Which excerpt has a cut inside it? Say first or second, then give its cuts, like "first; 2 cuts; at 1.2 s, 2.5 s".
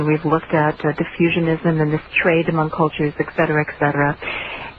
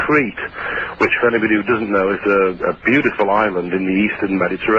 second; 1 cut; at 1.1 s